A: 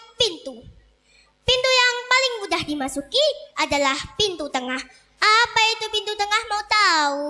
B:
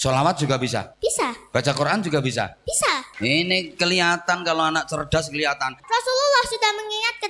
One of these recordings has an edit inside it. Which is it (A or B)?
B